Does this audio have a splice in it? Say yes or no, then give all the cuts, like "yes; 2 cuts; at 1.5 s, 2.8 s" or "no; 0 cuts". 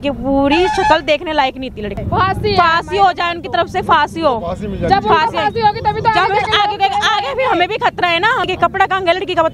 yes; 2 cuts; at 2.0 s, 8.4 s